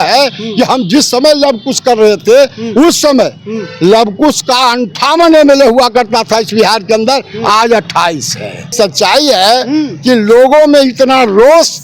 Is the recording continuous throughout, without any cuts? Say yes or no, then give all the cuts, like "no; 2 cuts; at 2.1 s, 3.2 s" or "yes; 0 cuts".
no; 1 cut; at 8.7 s